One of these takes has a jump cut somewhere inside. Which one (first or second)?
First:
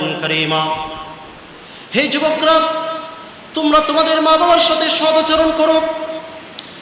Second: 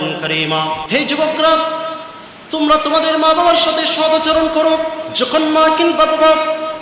second